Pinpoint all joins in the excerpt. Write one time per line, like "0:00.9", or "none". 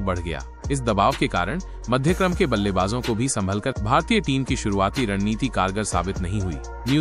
0:03.8